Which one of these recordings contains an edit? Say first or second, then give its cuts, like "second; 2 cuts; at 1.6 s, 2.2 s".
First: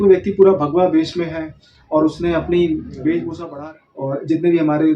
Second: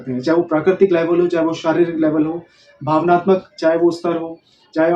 first; 1 cut; at 3.4 s